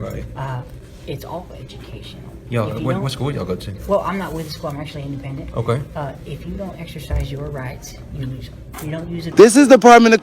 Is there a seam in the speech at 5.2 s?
no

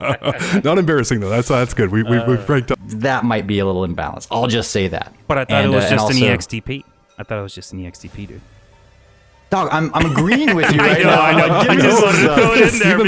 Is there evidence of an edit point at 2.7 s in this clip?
yes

